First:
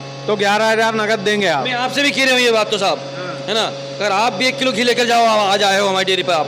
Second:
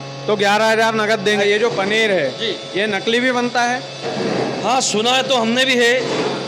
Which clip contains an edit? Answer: second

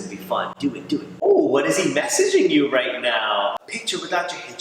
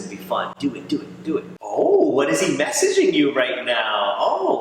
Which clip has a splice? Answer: first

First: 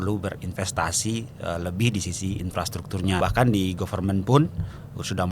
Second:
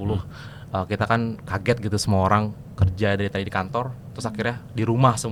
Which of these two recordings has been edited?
first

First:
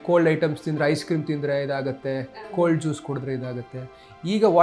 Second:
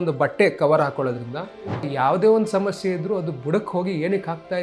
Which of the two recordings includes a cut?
second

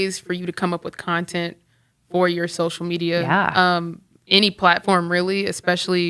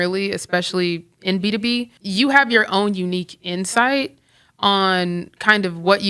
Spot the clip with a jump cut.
second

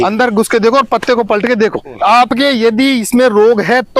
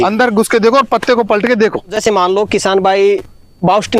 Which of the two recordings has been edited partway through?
first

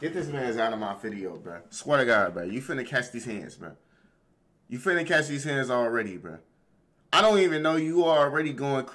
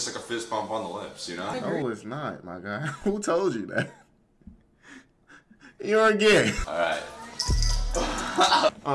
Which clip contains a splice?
second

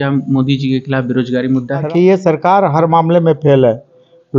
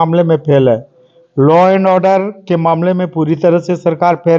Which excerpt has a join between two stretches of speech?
first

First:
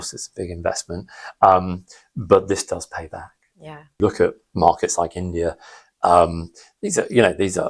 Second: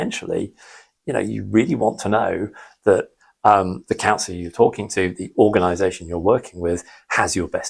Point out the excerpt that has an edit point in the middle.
first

